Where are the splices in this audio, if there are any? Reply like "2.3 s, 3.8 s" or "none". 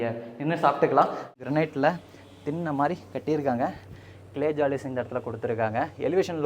1.2 s